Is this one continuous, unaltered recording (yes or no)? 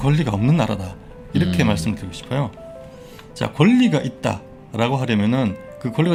yes